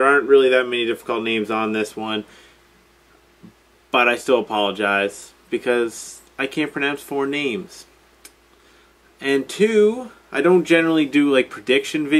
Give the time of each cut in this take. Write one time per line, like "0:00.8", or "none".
0:06.1